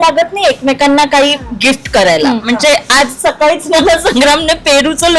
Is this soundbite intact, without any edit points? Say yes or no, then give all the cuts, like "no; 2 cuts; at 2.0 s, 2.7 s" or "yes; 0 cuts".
yes; 0 cuts